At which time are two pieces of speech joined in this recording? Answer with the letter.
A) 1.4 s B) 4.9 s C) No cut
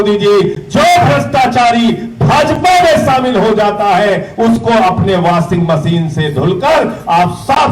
C